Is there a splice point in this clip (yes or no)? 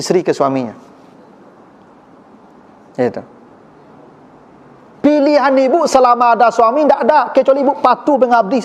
no